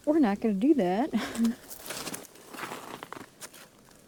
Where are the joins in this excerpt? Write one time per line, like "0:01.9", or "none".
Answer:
none